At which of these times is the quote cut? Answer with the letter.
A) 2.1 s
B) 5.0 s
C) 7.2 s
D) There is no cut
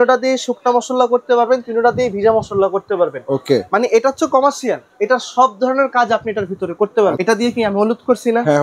C